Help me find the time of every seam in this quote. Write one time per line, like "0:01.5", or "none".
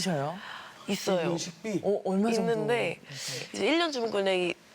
0:03.5